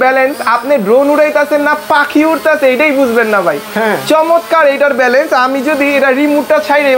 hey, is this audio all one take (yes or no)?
yes